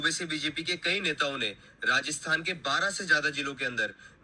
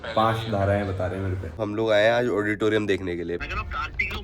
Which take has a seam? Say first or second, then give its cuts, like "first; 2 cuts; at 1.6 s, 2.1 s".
second; 2 cuts; at 1.6 s, 3.4 s